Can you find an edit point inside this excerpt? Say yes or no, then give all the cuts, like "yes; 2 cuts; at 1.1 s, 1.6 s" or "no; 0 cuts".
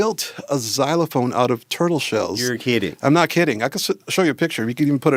no; 0 cuts